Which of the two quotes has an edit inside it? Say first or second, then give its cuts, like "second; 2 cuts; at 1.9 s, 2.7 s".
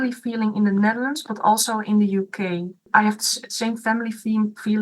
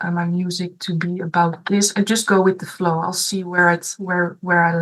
first; 1 cut; at 2.9 s